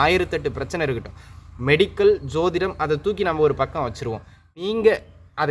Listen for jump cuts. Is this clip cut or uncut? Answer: cut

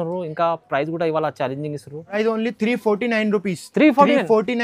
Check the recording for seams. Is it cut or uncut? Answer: cut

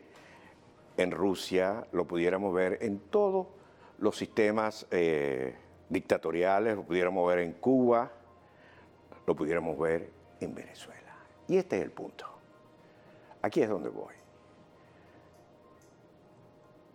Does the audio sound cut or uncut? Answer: uncut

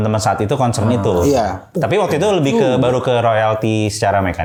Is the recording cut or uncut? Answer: uncut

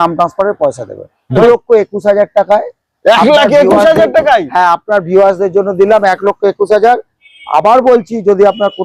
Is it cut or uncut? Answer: cut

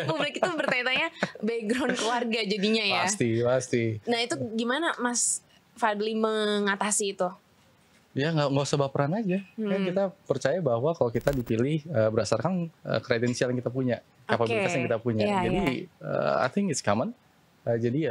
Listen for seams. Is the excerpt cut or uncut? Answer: uncut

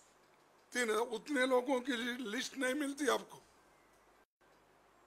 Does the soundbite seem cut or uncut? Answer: uncut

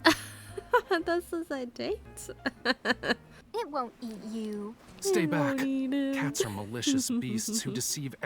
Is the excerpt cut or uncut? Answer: cut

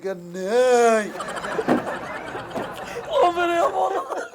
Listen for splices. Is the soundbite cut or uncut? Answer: cut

